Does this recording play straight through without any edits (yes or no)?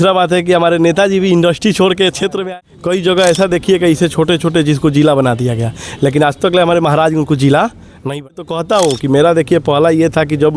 no